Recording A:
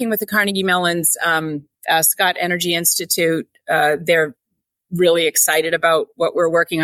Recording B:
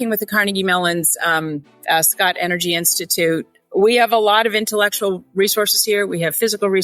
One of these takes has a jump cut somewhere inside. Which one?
B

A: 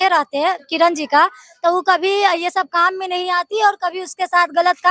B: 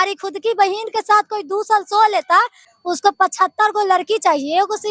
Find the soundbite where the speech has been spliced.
B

